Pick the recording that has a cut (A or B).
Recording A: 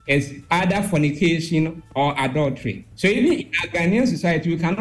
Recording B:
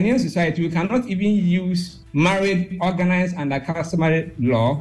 A